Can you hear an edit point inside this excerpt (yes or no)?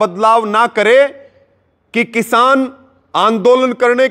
no